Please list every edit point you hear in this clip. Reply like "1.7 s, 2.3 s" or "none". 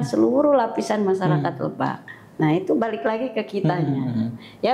2.1 s

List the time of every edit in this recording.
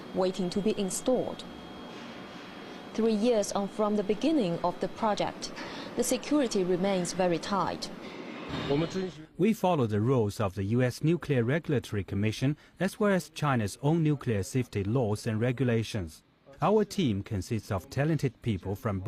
10.8 s

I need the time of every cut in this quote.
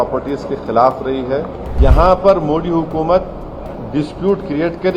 1.6 s

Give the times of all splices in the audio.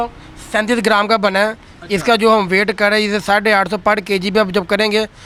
none

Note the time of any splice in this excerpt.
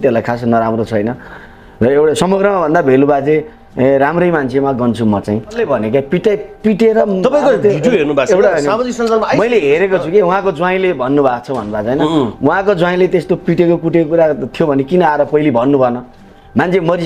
5.6 s

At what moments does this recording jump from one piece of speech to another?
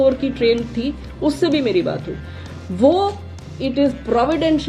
none

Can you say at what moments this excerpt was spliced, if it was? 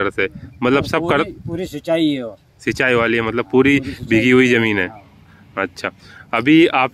none

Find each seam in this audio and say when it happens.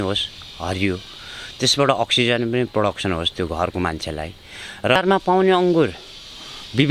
5.0 s

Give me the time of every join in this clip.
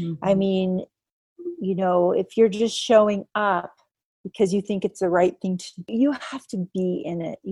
5.7 s

